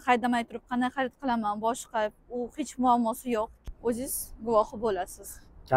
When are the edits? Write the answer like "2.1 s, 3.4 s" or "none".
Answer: 3.6 s